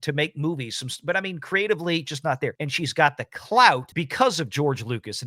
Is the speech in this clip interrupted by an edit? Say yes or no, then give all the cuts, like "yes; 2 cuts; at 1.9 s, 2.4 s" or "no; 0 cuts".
yes; 2 cuts; at 2.7 s, 4.0 s